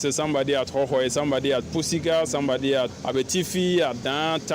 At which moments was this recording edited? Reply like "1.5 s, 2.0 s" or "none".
2.9 s